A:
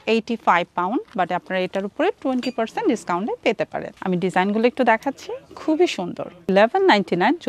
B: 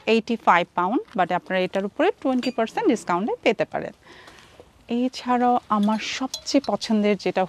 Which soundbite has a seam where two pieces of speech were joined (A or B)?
A